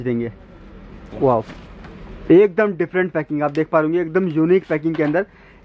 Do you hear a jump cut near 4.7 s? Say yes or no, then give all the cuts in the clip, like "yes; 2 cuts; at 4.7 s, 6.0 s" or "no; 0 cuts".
no; 1 cut; at 1.1 s